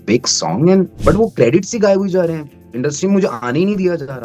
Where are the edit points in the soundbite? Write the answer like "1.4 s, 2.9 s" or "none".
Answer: 0.9 s